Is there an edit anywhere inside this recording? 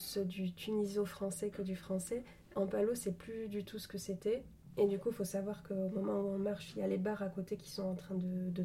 yes; 2 cuts; at 2.5 s, 4.6 s

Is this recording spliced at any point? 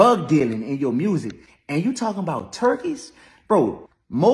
no; 0 cuts

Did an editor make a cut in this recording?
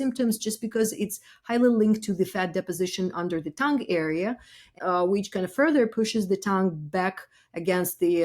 yes; 1 cut; at 4.8 s

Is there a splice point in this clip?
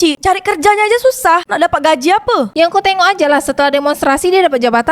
yes; 1 cut; at 2.5 s

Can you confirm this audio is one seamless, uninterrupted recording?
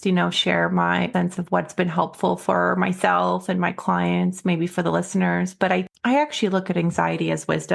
no; 2 cuts; at 1.1 s, 5.8 s

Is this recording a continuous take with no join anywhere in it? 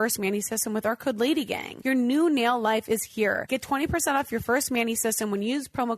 no; 2 cuts; at 1.7 s, 3.4 s

